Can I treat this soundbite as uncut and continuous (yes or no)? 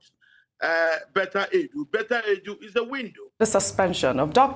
no